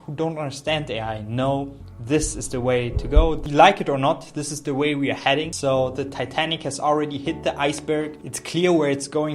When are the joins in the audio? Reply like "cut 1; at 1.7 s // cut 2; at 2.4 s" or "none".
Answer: cut 1; at 3.4 s // cut 2; at 5.5 s